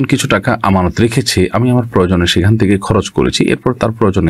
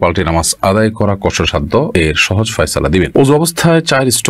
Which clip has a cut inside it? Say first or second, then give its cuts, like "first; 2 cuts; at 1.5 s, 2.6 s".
second; 2 cuts; at 1.9 s, 3.1 s